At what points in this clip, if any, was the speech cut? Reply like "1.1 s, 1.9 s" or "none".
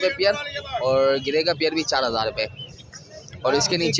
none